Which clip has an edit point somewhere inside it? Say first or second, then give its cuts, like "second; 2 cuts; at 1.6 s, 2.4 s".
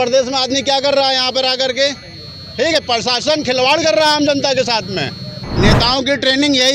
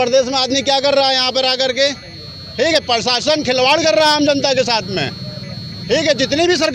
first; 1 cut; at 5.4 s